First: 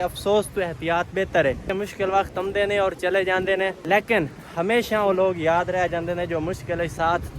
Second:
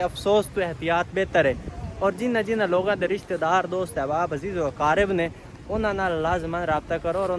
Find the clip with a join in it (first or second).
first